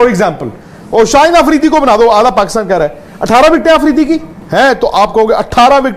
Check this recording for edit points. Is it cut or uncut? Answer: cut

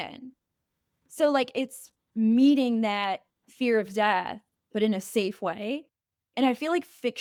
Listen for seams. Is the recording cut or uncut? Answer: uncut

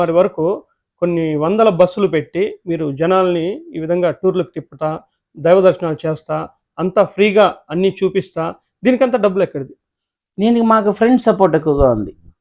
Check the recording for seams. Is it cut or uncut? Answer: uncut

